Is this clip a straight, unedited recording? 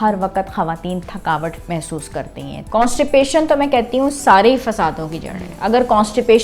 no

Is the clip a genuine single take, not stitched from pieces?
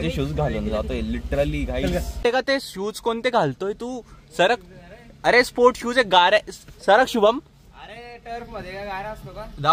no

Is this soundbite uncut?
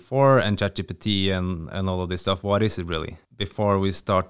no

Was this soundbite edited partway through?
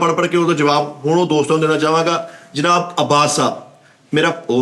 no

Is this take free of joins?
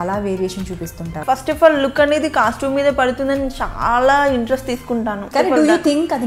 no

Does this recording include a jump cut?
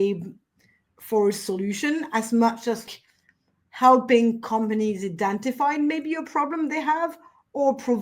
yes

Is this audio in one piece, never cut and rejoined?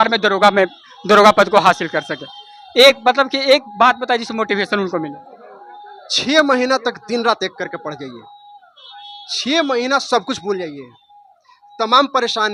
yes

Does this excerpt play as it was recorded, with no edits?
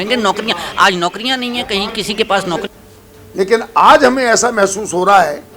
no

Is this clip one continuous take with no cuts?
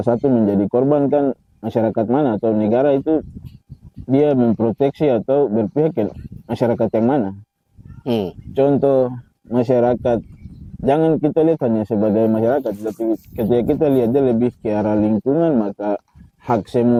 yes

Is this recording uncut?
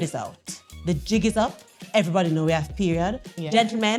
yes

